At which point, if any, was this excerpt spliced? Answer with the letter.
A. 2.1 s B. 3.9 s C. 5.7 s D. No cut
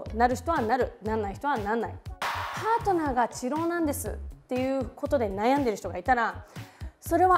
A